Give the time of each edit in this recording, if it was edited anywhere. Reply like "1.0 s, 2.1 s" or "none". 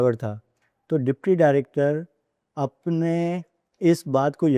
none